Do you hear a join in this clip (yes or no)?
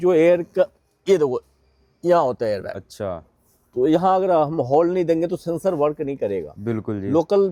no